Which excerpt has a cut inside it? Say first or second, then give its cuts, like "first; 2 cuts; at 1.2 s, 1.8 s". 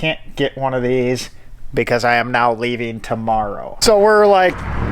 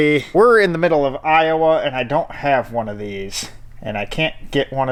first; 1 cut; at 3.7 s